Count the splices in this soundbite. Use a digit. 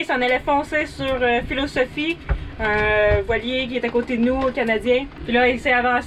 1